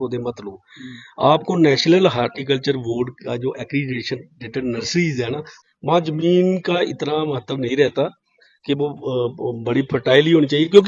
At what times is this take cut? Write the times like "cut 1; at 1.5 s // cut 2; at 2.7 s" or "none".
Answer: cut 1; at 5.5 s